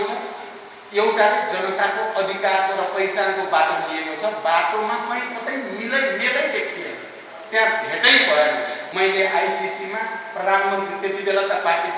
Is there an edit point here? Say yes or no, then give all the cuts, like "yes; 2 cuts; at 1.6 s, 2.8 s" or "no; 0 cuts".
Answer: yes; 1 cut; at 8.8 s